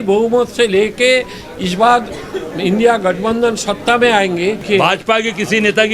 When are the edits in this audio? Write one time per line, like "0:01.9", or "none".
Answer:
0:04.6